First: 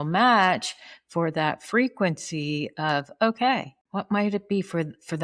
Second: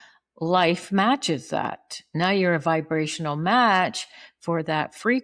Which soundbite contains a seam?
first; 1 cut; at 3.8 s

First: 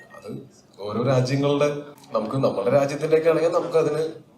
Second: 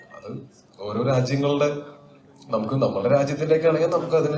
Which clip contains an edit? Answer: first; 1 cut; at 1.9 s

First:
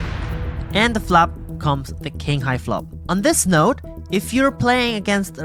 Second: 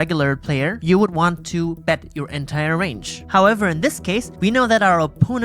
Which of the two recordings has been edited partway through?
second; 3 cuts; at 0.8 s, 3.2 s, 4.3 s

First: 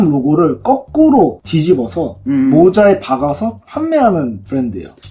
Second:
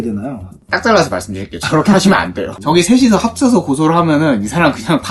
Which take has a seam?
second; 1 cut; at 2.5 s

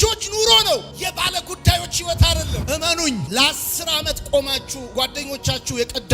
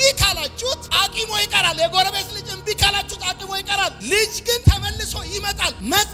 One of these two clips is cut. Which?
first; 1 cut; at 2.6 s

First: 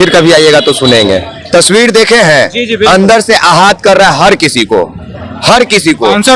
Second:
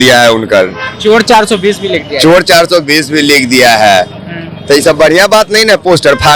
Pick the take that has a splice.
first; 1 cut; at 1.3 s

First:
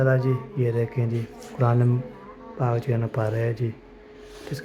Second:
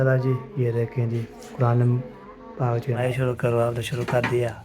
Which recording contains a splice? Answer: second; 1 cut; at 3.0 s

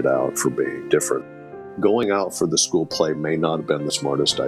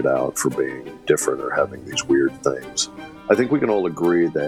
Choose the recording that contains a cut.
first; 1 cut; at 1.1 s

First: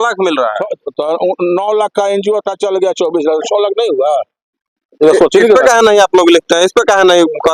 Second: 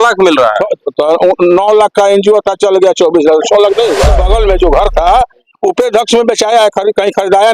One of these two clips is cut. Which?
second; 1 cut; at 4.2 s

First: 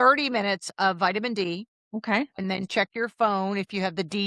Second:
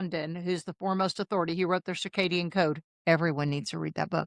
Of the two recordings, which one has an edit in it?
first; 1 cut; at 1.7 s

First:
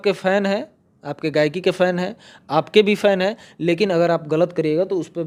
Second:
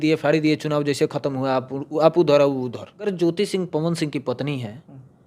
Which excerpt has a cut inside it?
second; 1 cut; at 3.1 s

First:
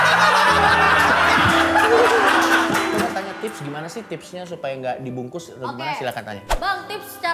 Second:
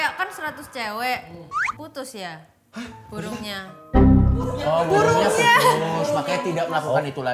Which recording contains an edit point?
first; 1 cut; at 3.0 s

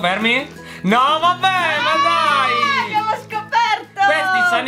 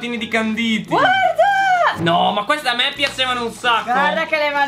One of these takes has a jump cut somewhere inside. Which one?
second; 1 cut; at 2.0 s

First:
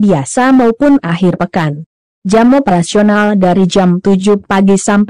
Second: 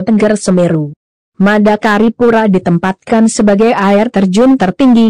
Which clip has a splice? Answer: second; 2 cuts; at 3.3 s, 4.2 s

